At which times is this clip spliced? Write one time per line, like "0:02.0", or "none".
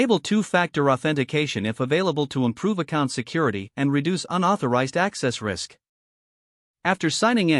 none

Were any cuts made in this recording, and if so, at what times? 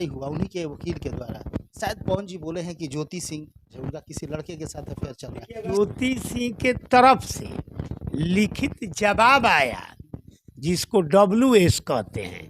0:01.7
0:03.8
0:05.8

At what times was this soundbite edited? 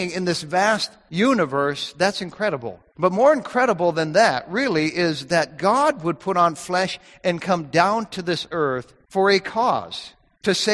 0:01.0
0:02.8
0:08.9

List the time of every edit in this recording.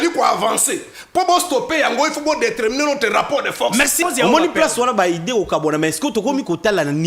0:04.0

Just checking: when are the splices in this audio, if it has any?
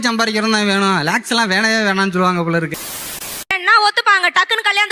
0:03.2

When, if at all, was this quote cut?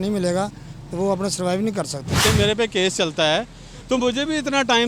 0:02.2

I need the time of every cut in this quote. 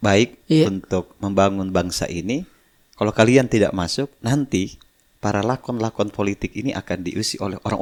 none

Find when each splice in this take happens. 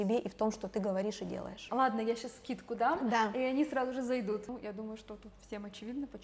0:01.6
0:04.5

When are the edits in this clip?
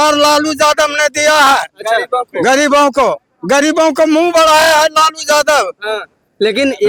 none

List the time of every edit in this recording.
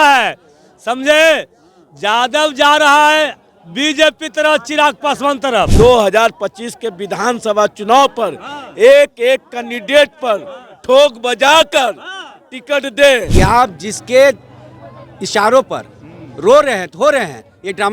0:05.7
0:13.3

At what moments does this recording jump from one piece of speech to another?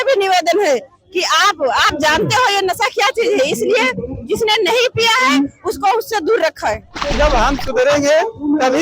0:07.0

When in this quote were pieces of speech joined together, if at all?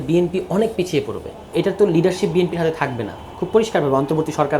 0:01.5

